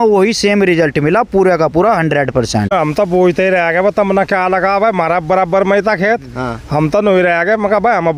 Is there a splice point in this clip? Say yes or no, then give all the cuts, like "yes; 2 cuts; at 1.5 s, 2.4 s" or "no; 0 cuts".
yes; 1 cut; at 2.7 s